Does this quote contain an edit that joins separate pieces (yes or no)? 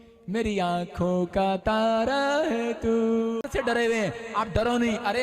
yes